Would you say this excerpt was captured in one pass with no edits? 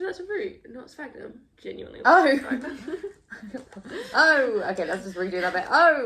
no; 1 cut; at 1.5 s

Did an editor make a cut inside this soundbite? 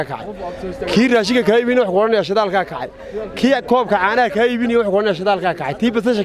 no; 0 cuts

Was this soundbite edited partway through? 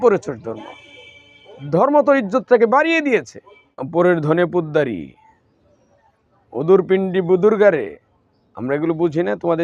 yes; 1 cut; at 3.8 s

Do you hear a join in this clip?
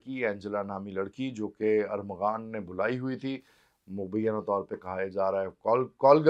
no; 0 cuts

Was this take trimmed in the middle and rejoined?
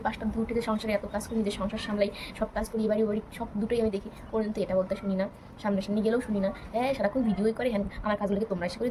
no; 0 cuts

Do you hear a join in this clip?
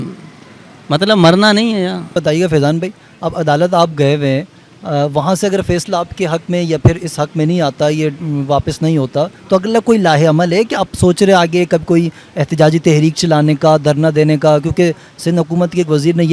no; 0 cuts

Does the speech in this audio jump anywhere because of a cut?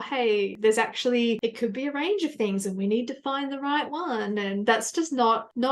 no; 0 cuts

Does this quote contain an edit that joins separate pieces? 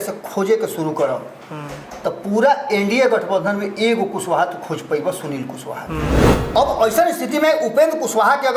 yes; 1 cut; at 6.3 s

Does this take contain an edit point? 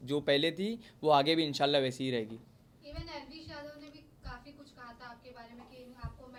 no; 0 cuts

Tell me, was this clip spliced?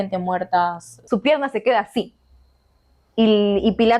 yes; 1 cut; at 1.0 s

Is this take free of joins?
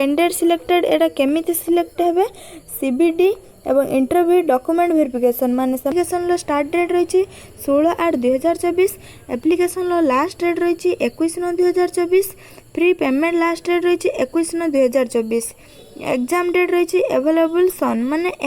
no; 1 cut; at 5.9 s

